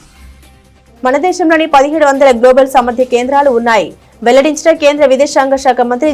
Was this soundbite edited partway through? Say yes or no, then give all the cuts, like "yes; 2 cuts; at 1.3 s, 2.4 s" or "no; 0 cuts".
yes; 1 cut; at 0.9 s